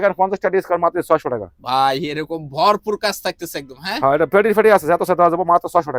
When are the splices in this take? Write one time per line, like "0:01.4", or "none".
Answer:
none